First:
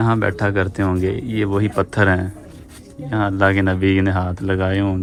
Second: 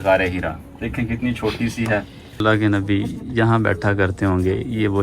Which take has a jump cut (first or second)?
second